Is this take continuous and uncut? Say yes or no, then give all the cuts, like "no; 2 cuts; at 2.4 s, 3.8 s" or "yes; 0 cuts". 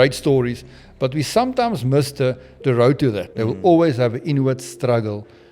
no; 1 cut; at 3.3 s